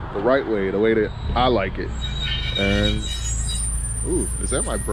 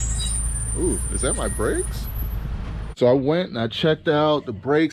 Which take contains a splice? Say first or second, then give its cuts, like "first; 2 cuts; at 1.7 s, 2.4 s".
second; 1 cut; at 2.9 s